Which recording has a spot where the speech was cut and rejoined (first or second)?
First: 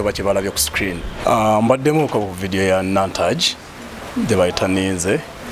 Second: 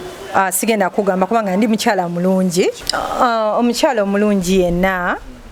first